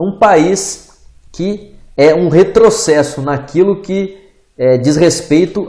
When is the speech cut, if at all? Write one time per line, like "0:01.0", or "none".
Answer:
0:03.2